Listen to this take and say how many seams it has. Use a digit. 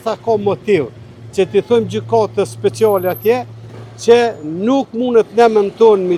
0